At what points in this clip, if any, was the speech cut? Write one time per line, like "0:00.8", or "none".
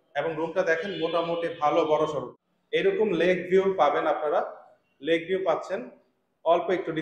0:02.3